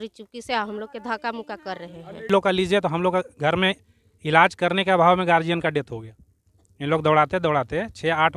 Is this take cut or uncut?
cut